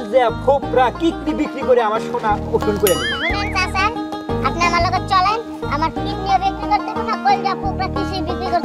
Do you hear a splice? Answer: no; 0 cuts

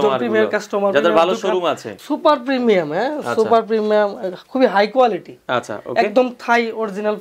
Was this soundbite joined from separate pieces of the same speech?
yes; 1 cut; at 1.9 s

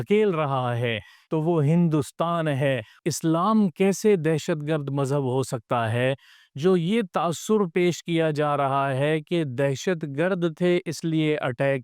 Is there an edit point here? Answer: yes; 2 cuts; at 1.1 s, 3.0 s

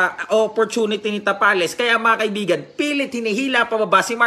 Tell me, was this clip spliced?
no; 0 cuts

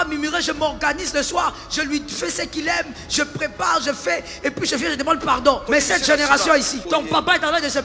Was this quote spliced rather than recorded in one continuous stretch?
yes; 2 cuts; at 5.7 s, 6.8 s

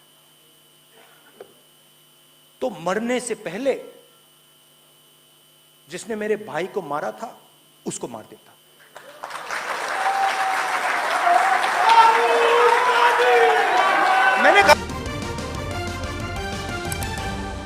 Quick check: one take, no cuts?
no; 1 cut; at 14.8 s

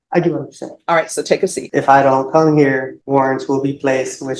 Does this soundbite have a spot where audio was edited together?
yes; 2 cuts; at 1.6 s, 2.9 s

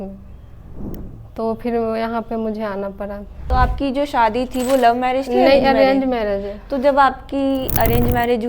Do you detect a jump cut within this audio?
yes; 1 cut; at 3.4 s

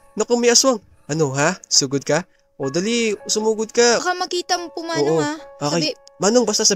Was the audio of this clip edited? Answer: yes; 1 cut; at 4.0 s

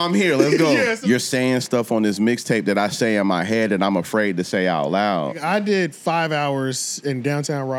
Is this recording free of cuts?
no; 2 cuts; at 1.0 s, 5.4 s

